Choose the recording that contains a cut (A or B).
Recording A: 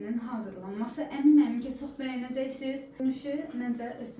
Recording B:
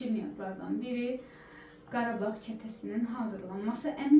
A